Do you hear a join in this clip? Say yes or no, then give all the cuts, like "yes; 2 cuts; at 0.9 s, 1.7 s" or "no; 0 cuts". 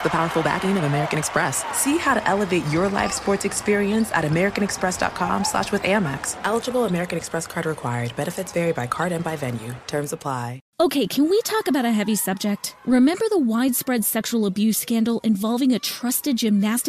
yes; 1 cut; at 10.6 s